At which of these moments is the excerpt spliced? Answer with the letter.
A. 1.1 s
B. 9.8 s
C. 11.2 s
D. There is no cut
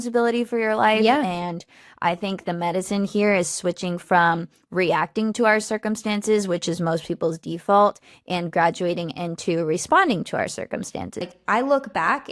C